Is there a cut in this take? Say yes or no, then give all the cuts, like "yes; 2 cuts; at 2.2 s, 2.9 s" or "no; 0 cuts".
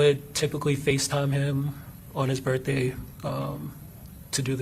no; 0 cuts